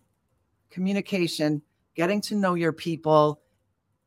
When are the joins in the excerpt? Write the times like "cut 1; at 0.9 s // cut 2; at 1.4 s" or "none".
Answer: none